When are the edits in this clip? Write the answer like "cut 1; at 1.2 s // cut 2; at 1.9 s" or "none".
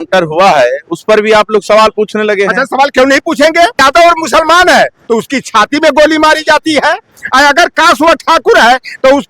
cut 1; at 3.8 s